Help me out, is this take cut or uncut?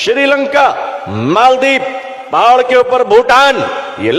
uncut